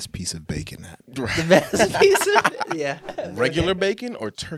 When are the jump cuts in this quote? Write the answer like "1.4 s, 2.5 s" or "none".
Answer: 3.1 s